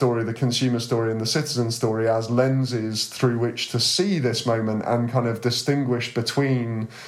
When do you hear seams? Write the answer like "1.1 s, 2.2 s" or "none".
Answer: none